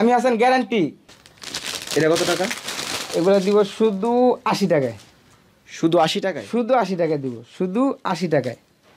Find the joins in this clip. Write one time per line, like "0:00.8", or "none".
0:01.1